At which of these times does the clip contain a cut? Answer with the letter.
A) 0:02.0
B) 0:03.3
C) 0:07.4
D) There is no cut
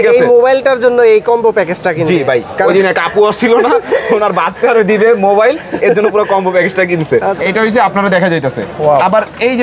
C